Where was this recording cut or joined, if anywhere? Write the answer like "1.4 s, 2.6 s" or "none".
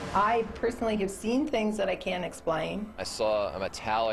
3.0 s